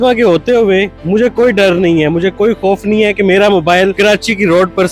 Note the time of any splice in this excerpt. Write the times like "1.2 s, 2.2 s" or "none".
1.0 s, 3.9 s